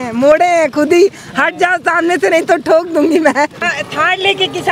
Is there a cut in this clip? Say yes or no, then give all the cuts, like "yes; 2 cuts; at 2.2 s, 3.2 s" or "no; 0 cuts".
yes; 1 cut; at 3.7 s